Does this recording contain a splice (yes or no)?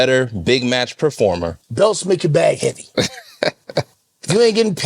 yes